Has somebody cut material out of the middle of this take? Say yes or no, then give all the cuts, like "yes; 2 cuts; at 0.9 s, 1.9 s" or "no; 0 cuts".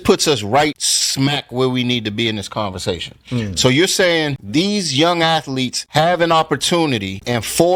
no; 0 cuts